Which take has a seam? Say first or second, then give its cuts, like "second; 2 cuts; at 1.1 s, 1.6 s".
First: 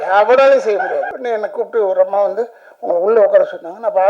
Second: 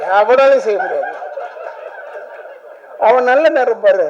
first; 1 cut; at 1.1 s